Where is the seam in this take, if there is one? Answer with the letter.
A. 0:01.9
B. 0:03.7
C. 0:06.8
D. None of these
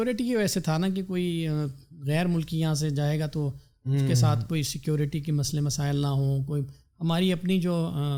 D